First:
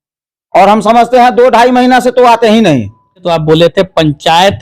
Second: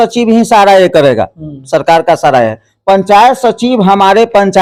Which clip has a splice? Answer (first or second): first